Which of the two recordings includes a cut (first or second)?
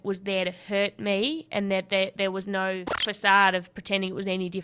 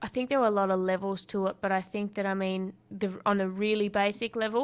first